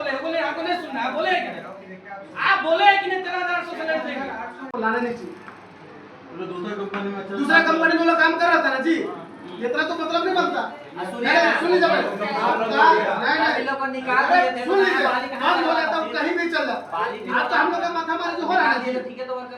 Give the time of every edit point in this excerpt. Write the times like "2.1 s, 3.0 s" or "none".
4.7 s

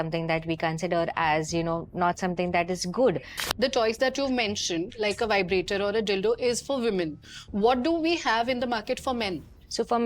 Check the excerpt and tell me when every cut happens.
3.4 s

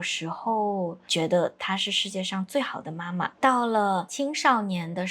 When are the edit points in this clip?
1.0 s, 3.3 s, 4.1 s

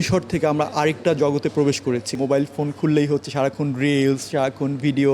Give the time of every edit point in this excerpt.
2.2 s

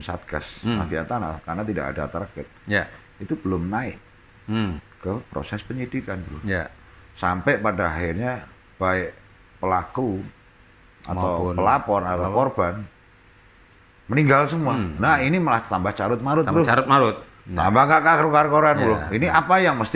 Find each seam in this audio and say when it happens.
none

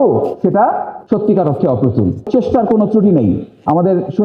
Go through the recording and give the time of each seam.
0.9 s, 2.3 s

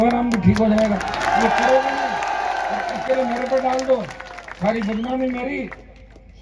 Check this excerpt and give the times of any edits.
none

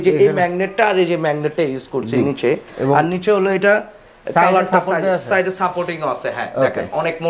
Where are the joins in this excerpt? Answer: none

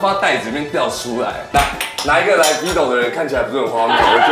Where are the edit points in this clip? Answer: 1.5 s

